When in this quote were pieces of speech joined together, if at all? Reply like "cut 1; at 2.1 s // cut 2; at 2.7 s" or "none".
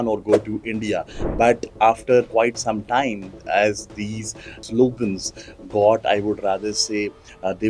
cut 1; at 2.3 s // cut 2; at 4.6 s